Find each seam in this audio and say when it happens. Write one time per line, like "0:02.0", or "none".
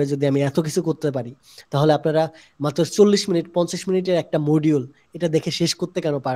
none